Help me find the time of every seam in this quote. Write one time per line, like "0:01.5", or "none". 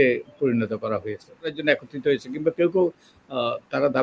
0:01.6